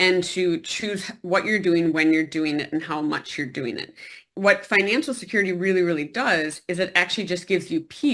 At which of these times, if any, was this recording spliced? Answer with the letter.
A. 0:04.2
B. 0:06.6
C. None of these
A